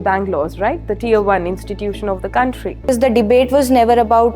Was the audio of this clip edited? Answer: yes; 1 cut; at 2.9 s

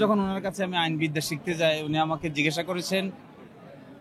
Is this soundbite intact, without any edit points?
yes; 0 cuts

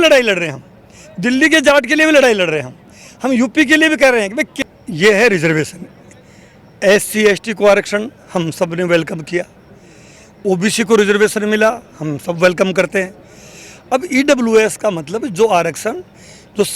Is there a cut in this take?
yes; 1 cut; at 4.5 s

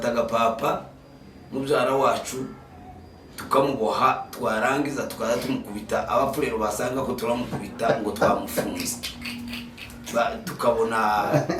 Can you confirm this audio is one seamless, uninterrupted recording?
yes; 0 cuts

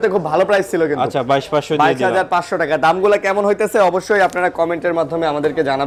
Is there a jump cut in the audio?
no; 0 cuts

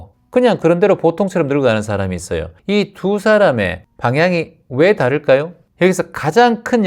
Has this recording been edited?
yes; 3 cuts; at 2.5 s, 3.8 s, 5.6 s

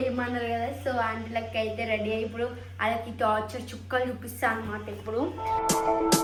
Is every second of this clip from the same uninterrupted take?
yes; 0 cuts

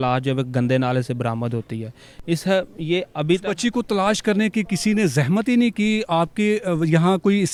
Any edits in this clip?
no; 0 cuts

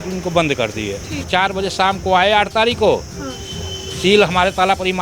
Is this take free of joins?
no; 1 cut; at 1.2 s

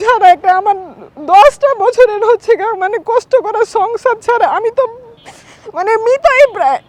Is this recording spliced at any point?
no; 0 cuts

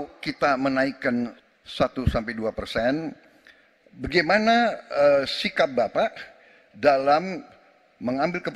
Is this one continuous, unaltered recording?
no; 1 cut; at 1.4 s

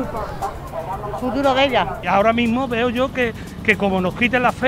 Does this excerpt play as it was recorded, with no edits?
no; 1 cut; at 2.0 s

